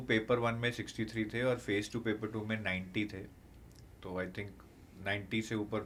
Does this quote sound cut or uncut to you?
uncut